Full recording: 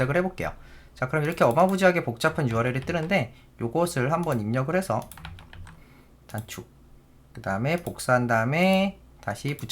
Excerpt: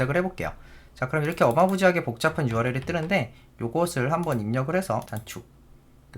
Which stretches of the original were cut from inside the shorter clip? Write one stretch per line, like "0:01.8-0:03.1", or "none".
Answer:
0:05.1-0:06.3